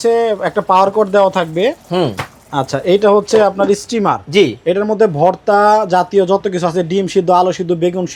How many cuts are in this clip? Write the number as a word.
zero